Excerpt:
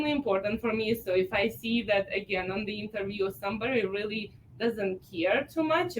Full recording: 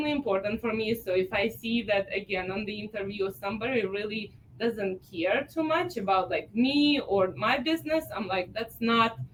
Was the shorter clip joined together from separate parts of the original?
no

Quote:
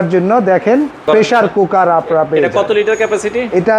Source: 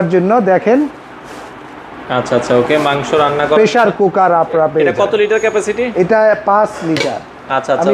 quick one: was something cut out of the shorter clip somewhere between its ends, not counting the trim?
yes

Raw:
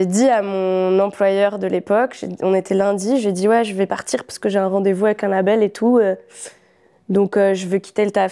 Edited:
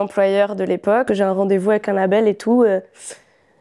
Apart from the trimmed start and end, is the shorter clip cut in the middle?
yes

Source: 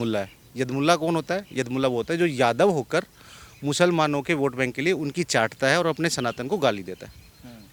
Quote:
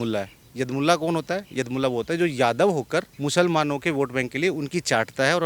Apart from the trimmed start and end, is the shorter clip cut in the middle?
yes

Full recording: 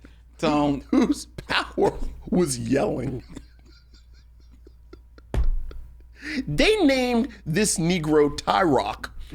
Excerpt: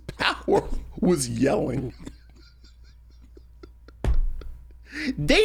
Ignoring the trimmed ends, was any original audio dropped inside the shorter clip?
no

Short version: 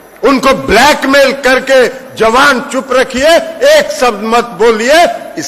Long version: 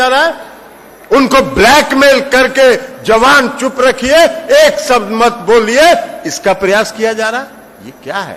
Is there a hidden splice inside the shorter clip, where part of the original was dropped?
no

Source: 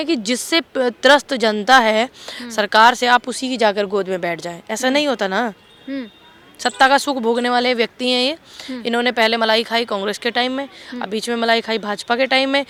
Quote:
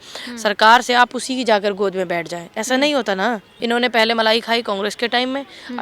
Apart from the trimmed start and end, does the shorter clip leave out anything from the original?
yes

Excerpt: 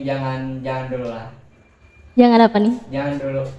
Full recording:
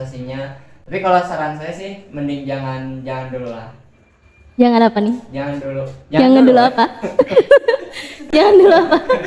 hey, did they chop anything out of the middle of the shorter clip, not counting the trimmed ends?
no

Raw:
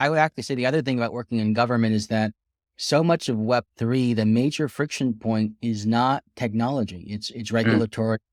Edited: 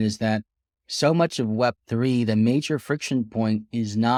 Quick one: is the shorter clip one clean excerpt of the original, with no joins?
yes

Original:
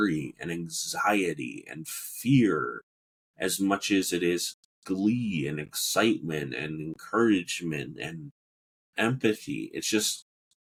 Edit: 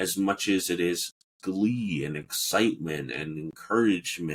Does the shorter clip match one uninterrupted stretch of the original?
yes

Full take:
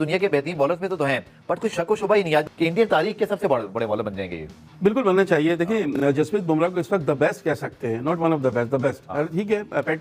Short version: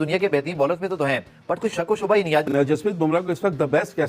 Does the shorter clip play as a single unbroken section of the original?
no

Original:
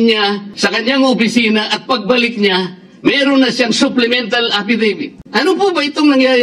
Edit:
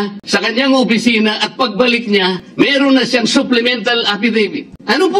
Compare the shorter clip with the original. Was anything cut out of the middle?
yes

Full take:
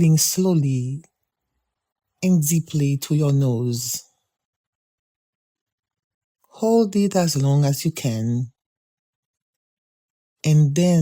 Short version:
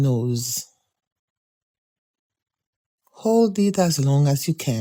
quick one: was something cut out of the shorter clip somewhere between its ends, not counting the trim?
no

